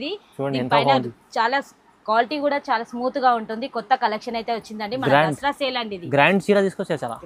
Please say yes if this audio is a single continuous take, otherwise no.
yes